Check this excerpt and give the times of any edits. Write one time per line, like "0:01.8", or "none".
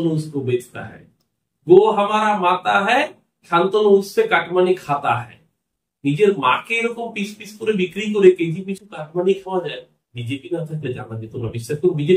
none